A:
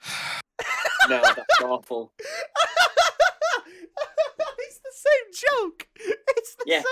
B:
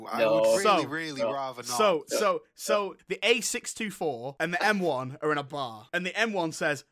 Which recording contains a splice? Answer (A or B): B